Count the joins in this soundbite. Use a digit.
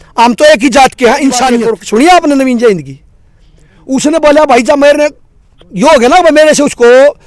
1